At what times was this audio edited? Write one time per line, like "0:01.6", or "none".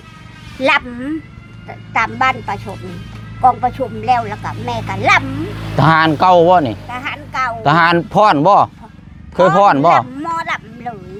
none